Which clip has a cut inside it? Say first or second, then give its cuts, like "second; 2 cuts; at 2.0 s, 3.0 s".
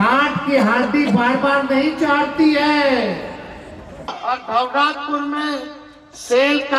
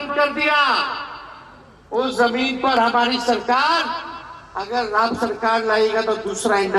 first; 1 cut; at 4.2 s